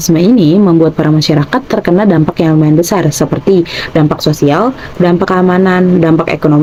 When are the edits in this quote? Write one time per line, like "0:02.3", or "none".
none